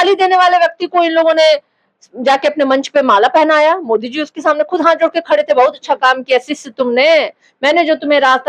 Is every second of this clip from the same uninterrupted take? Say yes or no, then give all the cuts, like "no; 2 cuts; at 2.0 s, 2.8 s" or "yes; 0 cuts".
yes; 0 cuts